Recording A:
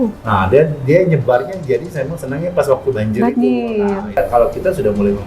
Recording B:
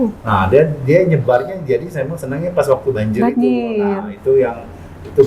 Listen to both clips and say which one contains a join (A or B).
A